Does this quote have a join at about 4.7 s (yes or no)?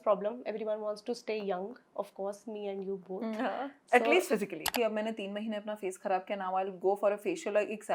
yes